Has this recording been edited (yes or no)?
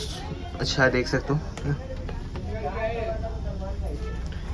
no